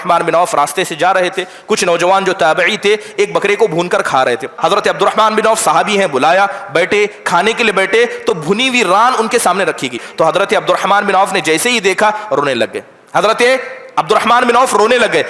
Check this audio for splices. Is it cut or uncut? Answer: cut